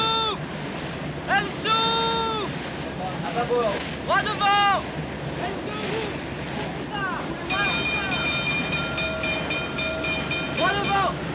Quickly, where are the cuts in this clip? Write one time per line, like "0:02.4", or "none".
none